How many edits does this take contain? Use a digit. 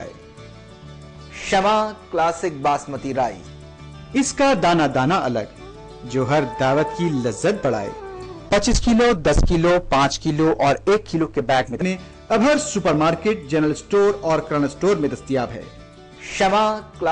0